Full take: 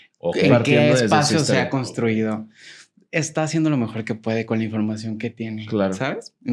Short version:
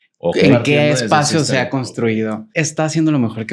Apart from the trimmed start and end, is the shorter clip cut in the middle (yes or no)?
yes